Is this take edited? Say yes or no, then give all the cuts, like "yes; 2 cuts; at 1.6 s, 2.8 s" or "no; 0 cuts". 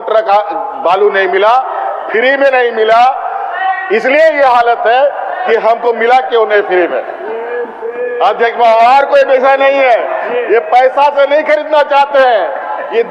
no; 0 cuts